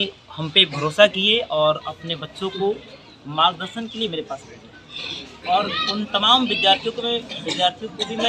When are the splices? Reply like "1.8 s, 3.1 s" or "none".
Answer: none